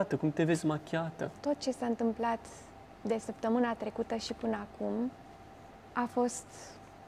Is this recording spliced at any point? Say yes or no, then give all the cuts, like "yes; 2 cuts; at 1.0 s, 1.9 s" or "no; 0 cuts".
yes; 1 cut; at 1.4 s